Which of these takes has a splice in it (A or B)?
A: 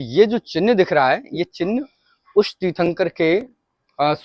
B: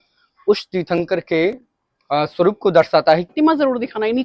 B